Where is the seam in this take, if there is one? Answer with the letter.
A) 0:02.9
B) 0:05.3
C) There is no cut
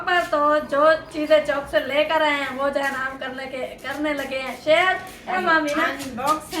B